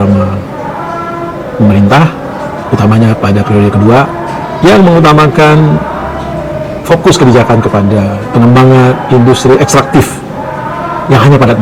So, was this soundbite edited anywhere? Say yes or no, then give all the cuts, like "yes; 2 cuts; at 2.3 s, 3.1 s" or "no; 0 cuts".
no; 0 cuts